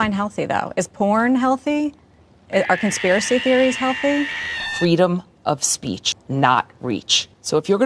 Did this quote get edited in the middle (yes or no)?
yes